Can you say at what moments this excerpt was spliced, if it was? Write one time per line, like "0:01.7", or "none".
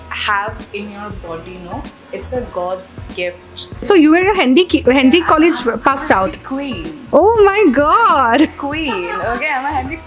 0:03.8